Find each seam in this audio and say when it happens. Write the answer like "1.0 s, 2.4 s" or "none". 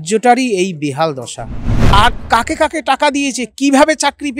1.9 s